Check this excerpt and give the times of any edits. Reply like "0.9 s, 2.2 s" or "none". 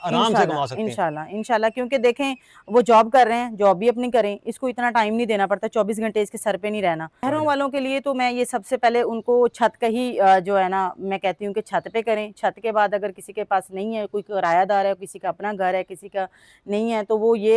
7.2 s